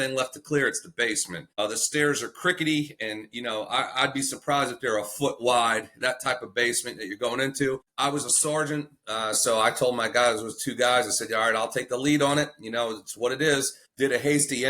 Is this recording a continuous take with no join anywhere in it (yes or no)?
no